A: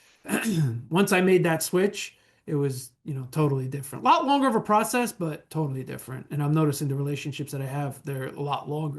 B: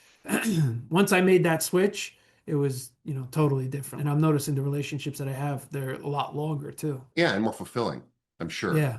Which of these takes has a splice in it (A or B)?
B